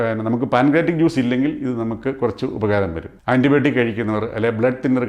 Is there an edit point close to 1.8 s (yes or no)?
no